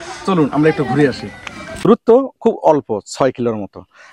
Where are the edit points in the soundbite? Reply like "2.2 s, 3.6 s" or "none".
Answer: 1.8 s